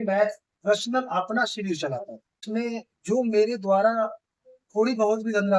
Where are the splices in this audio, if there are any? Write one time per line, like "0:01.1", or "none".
0:02.4